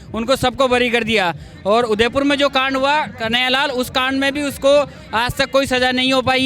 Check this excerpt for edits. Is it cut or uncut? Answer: uncut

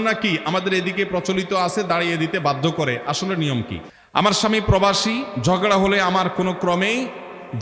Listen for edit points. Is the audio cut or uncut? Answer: cut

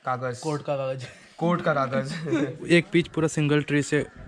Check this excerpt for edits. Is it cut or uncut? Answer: cut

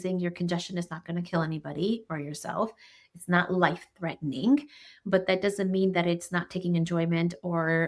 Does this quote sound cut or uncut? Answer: uncut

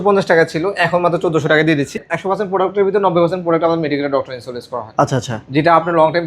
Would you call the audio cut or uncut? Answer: cut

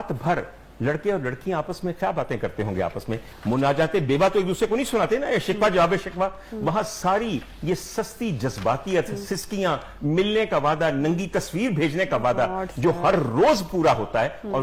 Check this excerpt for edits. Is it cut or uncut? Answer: uncut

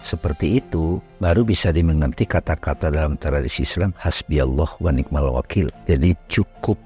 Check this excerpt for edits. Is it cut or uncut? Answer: cut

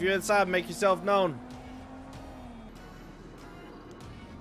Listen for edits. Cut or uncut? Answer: cut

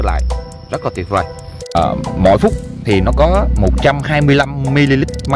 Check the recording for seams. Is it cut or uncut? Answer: cut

